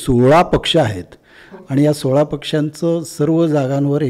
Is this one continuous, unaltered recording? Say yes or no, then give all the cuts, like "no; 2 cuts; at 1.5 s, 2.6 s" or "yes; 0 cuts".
yes; 0 cuts